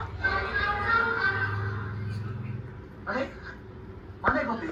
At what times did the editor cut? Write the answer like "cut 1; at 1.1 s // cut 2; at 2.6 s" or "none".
none

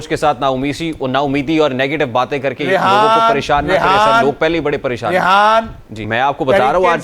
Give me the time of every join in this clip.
cut 1; at 6.0 s

